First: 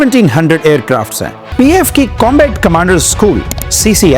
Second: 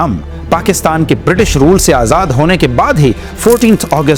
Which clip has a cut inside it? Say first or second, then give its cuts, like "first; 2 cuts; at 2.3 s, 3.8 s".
first; 1 cut; at 1.4 s